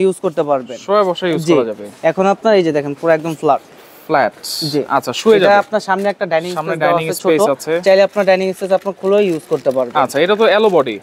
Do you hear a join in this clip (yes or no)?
no